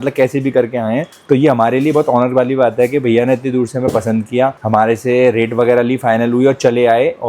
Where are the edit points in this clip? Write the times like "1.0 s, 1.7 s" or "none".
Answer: none